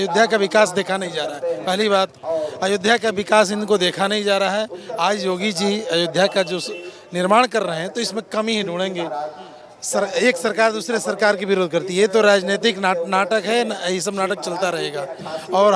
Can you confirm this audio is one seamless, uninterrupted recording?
yes; 0 cuts

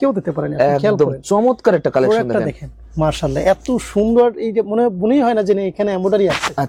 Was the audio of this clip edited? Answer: no; 0 cuts

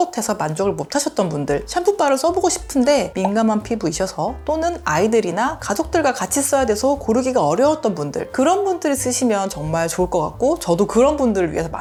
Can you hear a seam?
no; 0 cuts

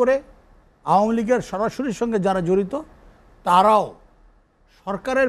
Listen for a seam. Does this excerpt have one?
no; 0 cuts

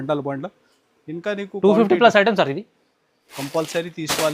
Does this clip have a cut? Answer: yes; 1 cut; at 3.3 s

